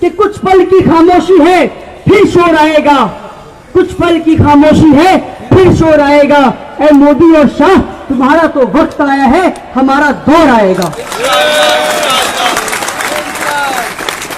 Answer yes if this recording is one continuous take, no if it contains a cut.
yes